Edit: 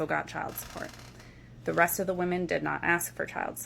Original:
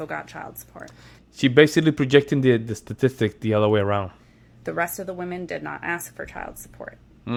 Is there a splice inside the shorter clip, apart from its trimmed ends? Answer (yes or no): yes